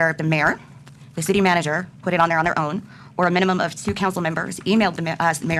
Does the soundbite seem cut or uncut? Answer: uncut